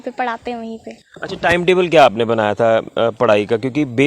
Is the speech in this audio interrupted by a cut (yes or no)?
no